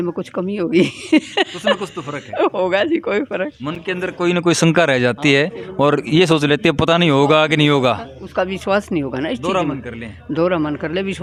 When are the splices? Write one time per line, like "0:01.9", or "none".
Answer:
none

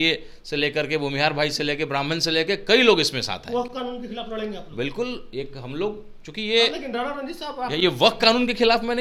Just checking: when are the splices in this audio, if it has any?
none

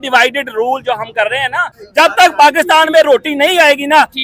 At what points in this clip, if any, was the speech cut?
0:01.8

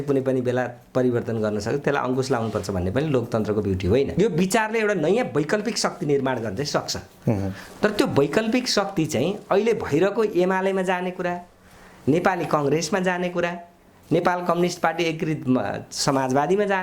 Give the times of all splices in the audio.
0:04.1

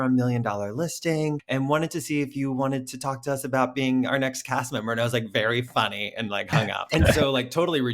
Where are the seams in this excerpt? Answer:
0:01.4
0:06.8

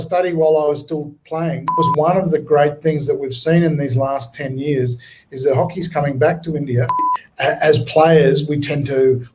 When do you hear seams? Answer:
0:01.8
0:07.2

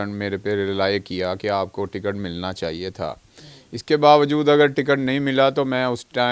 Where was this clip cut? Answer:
none

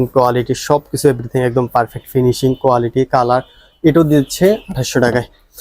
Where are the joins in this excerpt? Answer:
none

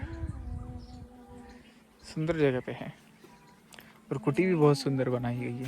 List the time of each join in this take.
none

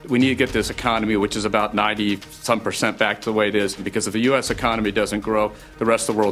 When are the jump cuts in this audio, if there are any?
0:03.9

